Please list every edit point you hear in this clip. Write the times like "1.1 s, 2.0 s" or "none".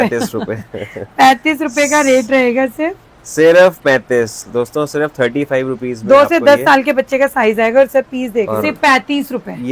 8.5 s